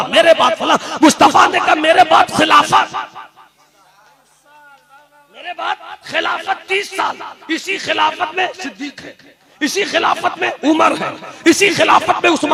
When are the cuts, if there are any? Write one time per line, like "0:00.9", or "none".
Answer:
none